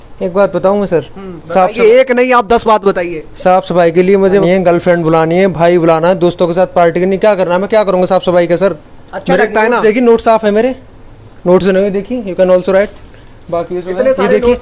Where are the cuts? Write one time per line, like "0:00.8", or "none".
0:04.4